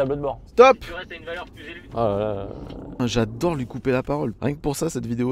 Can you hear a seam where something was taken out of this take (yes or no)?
yes